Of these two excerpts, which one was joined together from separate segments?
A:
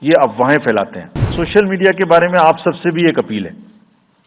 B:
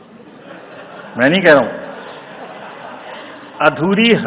A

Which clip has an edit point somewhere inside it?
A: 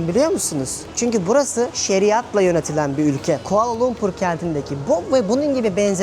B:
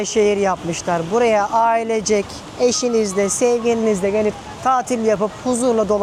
A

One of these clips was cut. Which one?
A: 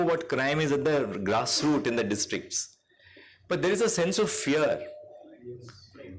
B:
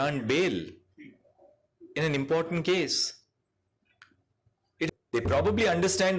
B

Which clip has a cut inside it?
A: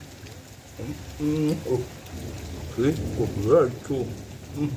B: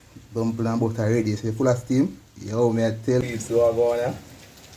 B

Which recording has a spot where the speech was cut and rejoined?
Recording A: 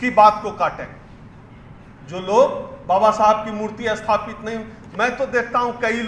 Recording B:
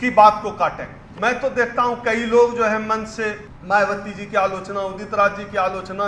B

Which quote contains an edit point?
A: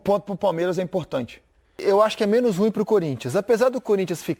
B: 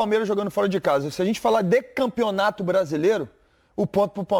A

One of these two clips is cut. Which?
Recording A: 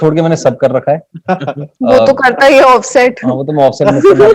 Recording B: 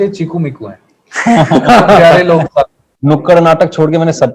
B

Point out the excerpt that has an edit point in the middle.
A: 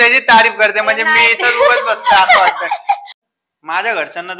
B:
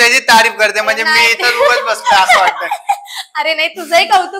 A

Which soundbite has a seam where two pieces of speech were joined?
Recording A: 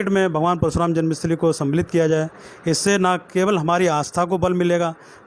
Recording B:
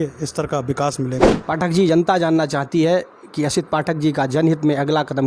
B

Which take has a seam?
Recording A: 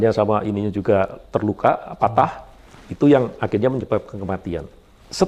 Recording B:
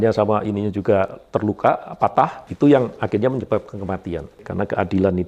B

